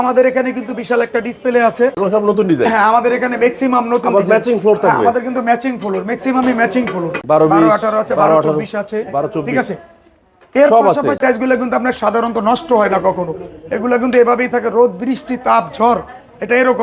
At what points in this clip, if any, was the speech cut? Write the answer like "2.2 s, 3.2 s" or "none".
1.9 s, 7.2 s, 11.2 s